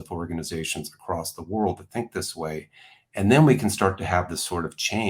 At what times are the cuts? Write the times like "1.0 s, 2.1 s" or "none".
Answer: none